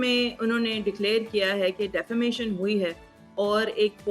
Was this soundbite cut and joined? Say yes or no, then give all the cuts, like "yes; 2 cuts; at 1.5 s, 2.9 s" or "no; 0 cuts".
no; 0 cuts